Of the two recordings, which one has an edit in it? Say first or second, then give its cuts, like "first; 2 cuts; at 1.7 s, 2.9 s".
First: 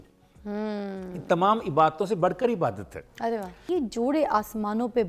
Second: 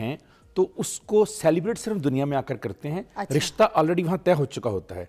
first; 1 cut; at 3.5 s